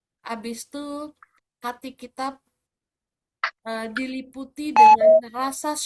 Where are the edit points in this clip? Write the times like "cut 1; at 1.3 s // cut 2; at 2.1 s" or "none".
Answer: none